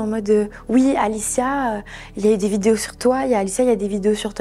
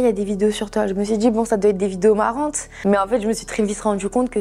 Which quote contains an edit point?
second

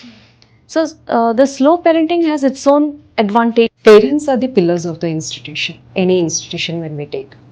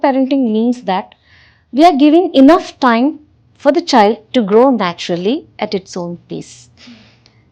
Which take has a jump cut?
first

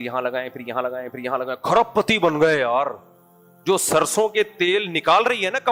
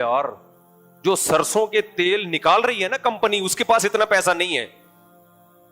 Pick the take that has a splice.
second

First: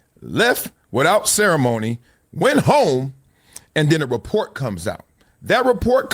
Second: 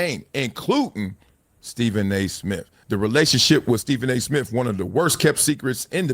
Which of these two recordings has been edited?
second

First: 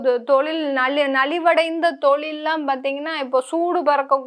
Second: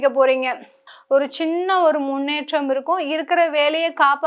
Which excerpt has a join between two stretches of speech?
second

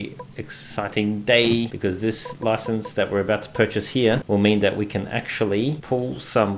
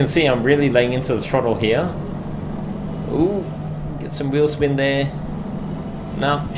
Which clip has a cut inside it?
first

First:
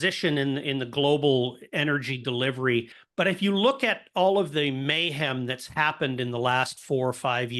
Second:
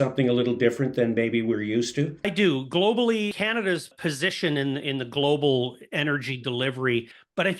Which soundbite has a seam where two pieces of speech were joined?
second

